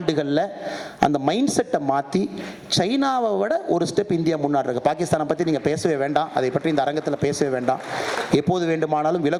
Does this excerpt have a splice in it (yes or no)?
no